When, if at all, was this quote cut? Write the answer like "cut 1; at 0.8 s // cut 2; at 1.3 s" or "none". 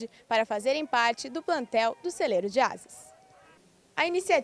cut 1; at 1.2 s

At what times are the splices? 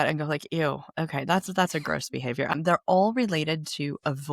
cut 1; at 2.5 s

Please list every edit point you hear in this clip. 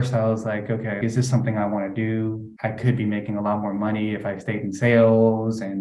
cut 1; at 1.0 s // cut 2; at 2.5 s

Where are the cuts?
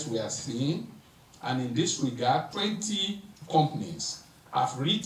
cut 1; at 2.5 s

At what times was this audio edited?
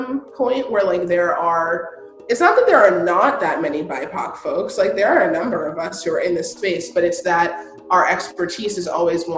none

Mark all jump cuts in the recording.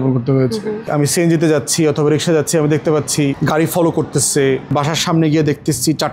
cut 1; at 3.4 s // cut 2; at 4.7 s

